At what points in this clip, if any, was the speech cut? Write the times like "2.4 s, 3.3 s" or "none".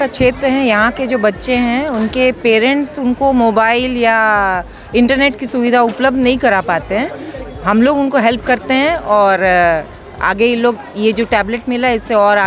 none

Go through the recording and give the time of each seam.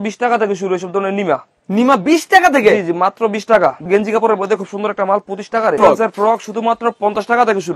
3.9 s, 5.8 s

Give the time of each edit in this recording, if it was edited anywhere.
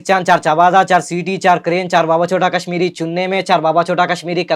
none

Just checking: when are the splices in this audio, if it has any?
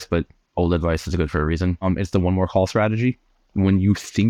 1.8 s

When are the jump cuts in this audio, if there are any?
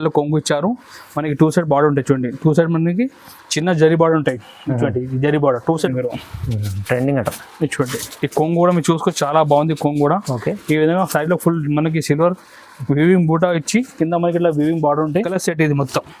5.9 s, 15.3 s

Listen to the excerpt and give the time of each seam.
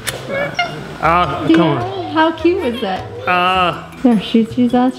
none

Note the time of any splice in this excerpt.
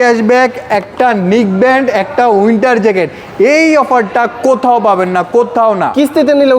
none

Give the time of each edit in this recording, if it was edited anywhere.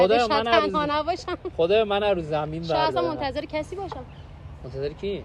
none

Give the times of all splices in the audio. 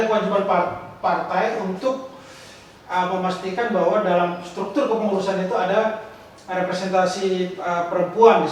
none

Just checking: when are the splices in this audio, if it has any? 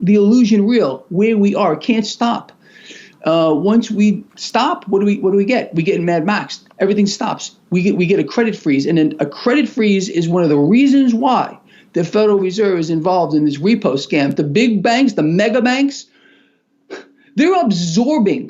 14.4 s

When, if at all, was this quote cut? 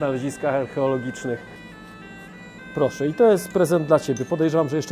1.6 s

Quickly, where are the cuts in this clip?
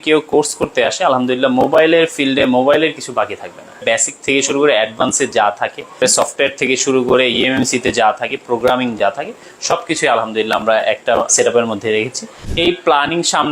3.8 s, 6.0 s, 11.3 s, 12.4 s

